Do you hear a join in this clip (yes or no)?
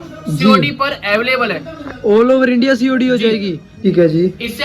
yes